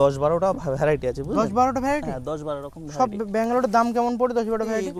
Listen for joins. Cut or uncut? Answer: uncut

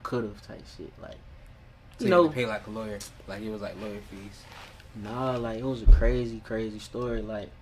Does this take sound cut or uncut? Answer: uncut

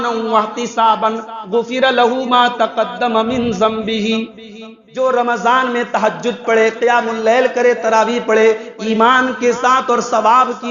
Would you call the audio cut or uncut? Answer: uncut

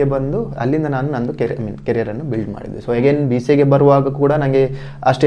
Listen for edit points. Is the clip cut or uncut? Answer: uncut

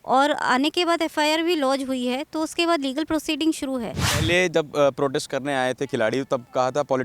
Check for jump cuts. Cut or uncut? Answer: cut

